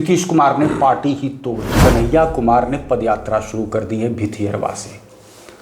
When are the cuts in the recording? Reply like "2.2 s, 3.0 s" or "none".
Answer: 1.8 s